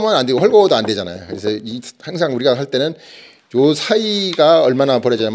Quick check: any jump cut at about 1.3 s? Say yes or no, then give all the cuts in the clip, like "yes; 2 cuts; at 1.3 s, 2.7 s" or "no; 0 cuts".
no; 0 cuts